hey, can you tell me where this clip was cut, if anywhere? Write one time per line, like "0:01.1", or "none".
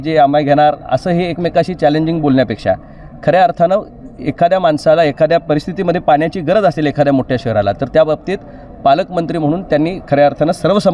none